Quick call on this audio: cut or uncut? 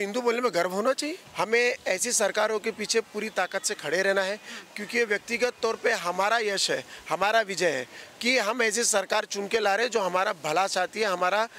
cut